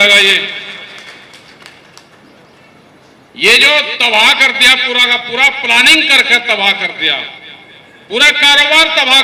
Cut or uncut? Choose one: uncut